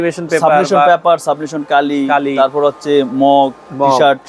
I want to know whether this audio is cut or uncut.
uncut